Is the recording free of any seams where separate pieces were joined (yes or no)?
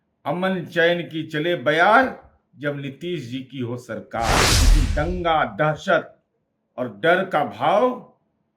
no